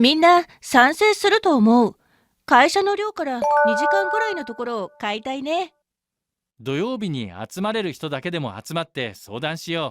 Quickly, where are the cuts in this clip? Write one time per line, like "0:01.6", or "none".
0:03.1
0:04.0